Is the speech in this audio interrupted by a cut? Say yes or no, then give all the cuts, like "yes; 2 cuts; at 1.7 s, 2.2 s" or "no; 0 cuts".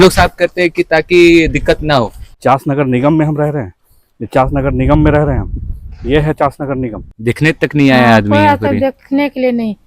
yes; 2 cuts; at 2.2 s, 7.1 s